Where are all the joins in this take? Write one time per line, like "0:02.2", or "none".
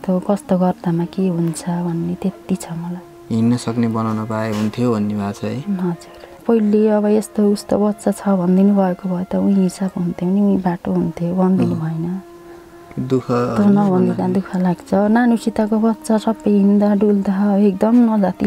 0:06.4